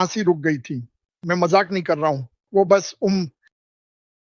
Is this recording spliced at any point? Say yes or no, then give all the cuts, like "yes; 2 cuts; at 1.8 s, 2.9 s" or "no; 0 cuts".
no; 0 cuts